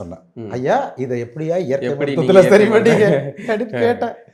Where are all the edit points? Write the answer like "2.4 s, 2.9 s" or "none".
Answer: none